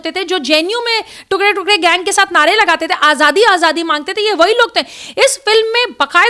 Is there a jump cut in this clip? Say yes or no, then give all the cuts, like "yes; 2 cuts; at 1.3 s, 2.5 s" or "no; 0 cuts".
no; 0 cuts